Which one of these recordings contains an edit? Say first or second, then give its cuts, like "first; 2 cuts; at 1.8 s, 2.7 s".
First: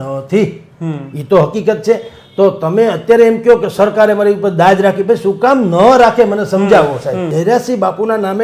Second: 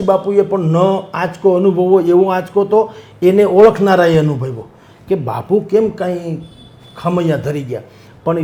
first; 1 cut; at 7.3 s